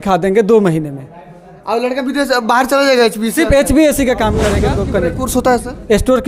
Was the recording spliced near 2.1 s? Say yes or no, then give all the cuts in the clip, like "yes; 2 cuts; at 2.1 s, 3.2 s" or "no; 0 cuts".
no; 1 cut; at 4.5 s